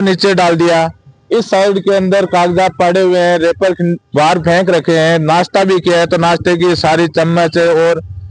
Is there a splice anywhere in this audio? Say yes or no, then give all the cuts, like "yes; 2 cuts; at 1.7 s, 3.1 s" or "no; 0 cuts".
no; 0 cuts